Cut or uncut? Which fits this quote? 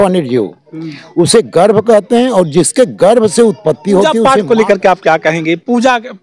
cut